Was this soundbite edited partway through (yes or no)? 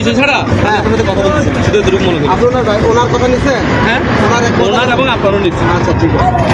no